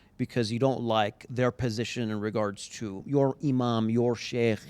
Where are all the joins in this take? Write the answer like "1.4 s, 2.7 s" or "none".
3.0 s